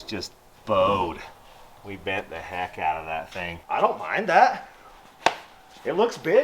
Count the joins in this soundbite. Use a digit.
1